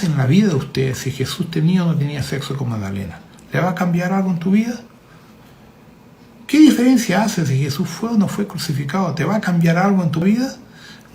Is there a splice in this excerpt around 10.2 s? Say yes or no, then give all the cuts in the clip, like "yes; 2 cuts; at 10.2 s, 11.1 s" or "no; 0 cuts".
yes; 1 cut; at 10.2 s